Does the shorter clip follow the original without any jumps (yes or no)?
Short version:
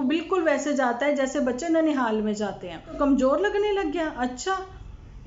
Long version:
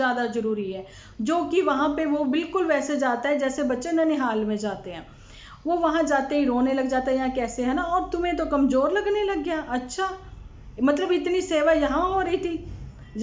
no